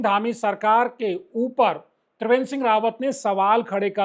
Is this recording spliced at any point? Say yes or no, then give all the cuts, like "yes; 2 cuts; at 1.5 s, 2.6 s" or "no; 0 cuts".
no; 0 cuts